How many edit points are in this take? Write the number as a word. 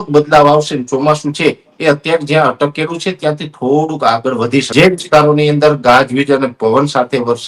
one